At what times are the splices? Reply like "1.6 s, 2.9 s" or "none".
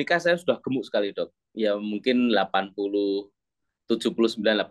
none